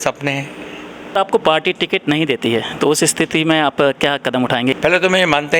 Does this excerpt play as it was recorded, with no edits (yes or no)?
no